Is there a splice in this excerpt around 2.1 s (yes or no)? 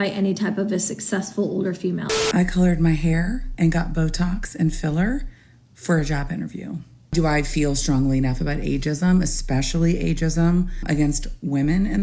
yes